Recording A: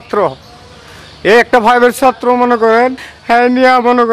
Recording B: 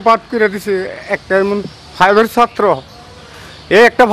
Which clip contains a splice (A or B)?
A